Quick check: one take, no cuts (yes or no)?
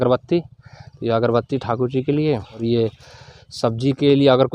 no